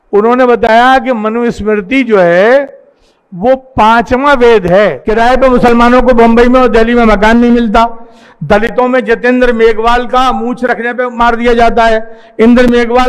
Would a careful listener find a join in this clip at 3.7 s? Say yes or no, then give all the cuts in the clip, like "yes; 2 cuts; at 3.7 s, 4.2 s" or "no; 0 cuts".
no; 1 cut; at 5.0 s